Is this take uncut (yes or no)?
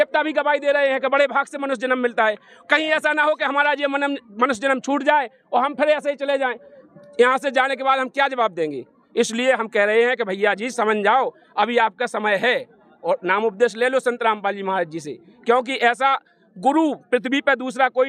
yes